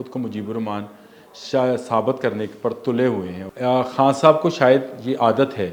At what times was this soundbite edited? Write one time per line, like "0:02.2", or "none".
0:03.4